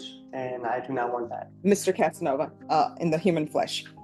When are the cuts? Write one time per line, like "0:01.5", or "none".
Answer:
0:01.5
0:02.6